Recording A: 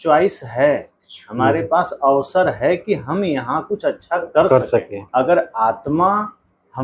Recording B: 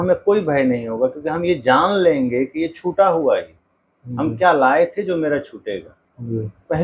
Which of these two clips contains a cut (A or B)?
A